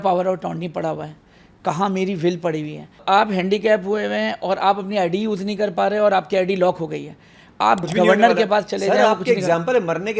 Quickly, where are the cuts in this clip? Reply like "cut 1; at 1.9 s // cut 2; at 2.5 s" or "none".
cut 1; at 3.0 s // cut 2; at 7.8 s